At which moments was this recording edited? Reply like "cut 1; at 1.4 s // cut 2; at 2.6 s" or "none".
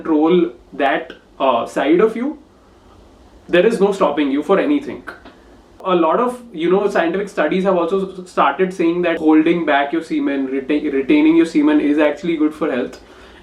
cut 1; at 5.8 s // cut 2; at 9.2 s

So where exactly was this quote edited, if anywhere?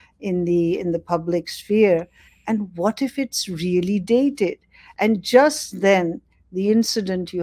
none

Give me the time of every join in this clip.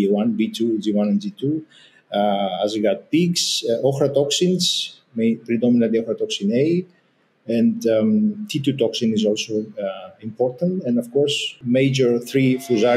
cut 1; at 11.6 s

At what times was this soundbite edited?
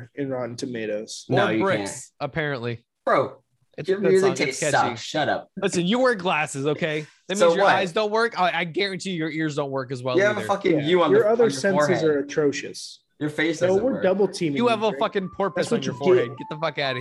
cut 1; at 5.6 s

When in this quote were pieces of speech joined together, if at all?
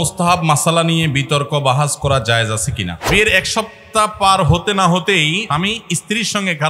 cut 1; at 2.9 s // cut 2; at 5.4 s

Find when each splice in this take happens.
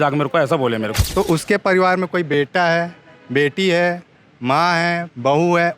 cut 1; at 1.0 s

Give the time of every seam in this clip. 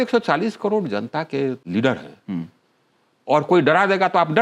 cut 1; at 1.6 s

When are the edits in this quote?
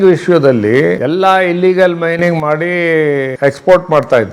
cut 1; at 1.0 s // cut 2; at 3.3 s

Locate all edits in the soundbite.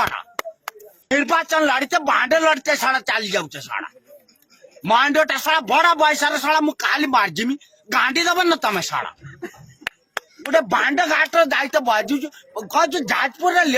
cut 1; at 1.1 s

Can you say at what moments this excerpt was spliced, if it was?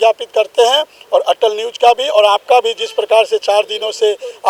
none

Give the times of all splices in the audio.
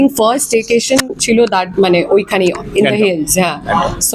none

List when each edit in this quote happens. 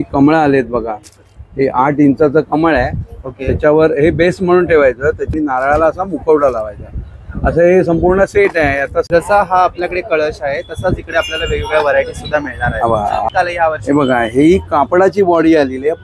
cut 1; at 5.3 s // cut 2; at 9.2 s // cut 3; at 13.3 s

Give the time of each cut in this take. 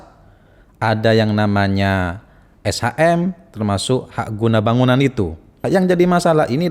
cut 1; at 5.6 s

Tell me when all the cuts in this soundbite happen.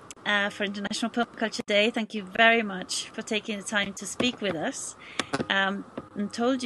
none

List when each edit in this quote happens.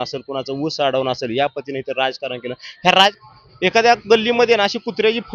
cut 1; at 3.1 s

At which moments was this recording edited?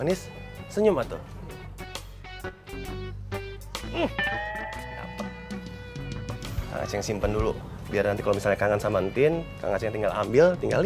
cut 1; at 6.5 s

